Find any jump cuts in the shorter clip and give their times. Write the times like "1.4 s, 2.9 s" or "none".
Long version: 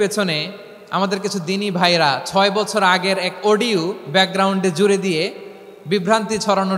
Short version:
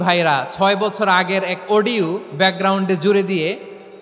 none